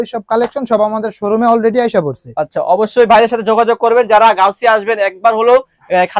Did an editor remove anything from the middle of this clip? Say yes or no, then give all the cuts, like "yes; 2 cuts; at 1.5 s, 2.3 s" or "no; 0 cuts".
no; 0 cuts